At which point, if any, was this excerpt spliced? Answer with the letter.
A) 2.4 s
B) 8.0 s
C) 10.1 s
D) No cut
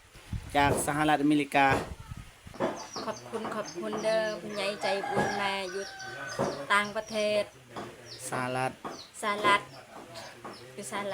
A